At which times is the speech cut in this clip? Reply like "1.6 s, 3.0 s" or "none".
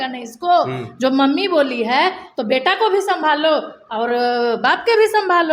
none

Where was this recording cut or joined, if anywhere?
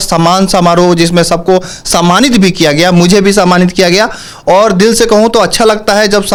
none

